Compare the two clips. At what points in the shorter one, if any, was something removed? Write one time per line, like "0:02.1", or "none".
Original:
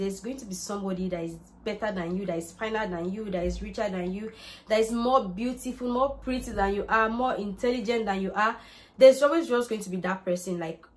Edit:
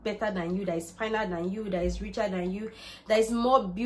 none